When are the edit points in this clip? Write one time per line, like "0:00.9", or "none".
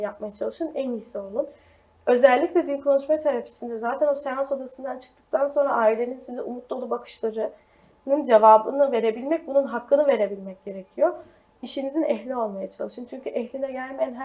0:11.7